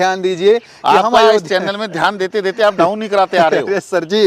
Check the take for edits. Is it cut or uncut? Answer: uncut